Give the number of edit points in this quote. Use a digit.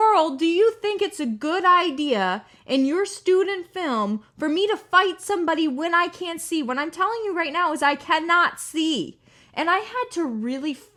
0